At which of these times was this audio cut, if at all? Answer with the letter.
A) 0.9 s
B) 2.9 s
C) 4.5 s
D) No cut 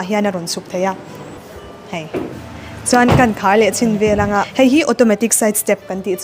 C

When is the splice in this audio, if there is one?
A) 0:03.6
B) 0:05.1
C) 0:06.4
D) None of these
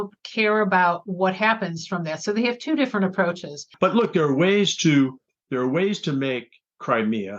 A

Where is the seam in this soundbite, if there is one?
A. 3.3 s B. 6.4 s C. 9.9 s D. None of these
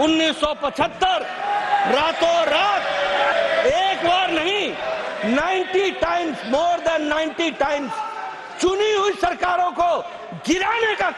A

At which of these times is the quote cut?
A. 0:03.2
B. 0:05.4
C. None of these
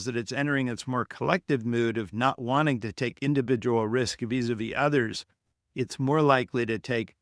C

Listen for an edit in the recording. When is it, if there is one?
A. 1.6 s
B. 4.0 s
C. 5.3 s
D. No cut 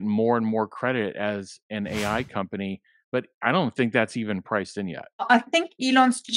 C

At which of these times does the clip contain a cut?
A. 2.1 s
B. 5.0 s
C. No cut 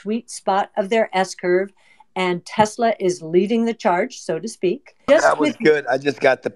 B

